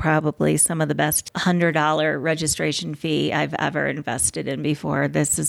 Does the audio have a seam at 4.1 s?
no; 1 cut; at 1.3 s

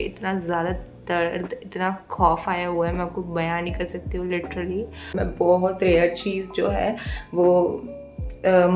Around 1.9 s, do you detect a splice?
no; 1 cut; at 5.1 s

